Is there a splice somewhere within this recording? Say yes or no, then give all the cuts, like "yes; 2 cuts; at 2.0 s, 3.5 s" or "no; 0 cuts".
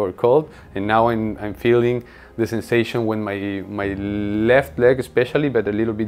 no; 0 cuts